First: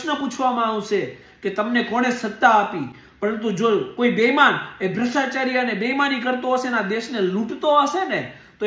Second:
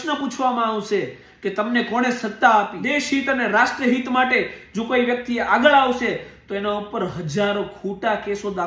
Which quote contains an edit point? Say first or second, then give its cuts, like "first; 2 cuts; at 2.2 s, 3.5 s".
second; 1 cut; at 2.8 s